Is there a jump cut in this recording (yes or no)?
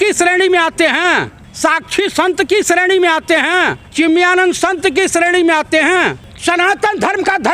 yes